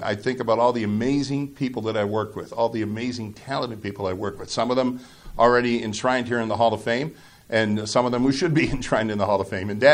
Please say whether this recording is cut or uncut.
uncut